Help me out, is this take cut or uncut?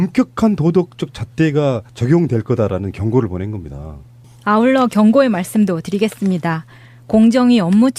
uncut